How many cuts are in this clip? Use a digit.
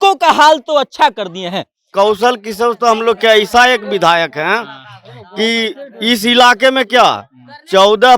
1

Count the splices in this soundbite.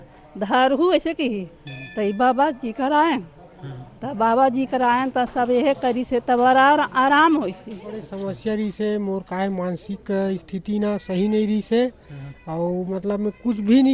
1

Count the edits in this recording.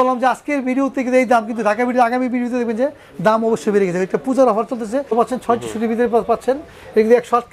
1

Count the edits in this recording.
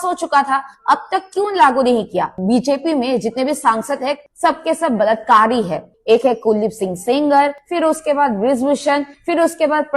2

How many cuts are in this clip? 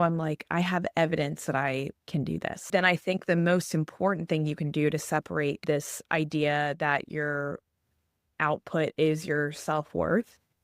1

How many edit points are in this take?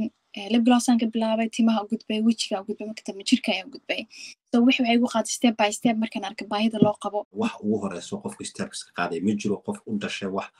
1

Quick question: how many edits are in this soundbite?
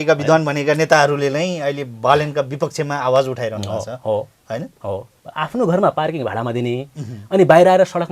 1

